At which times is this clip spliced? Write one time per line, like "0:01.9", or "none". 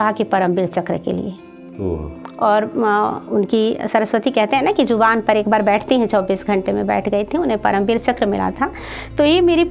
none